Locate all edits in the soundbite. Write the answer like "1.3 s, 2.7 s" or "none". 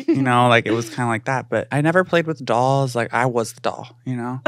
1.7 s